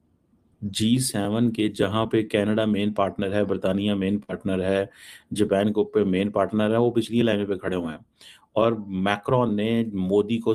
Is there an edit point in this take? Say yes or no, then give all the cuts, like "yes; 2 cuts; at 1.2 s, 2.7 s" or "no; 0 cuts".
no; 0 cuts